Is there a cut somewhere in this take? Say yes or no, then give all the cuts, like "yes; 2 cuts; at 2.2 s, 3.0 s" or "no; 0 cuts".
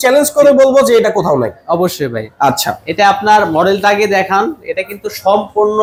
no; 0 cuts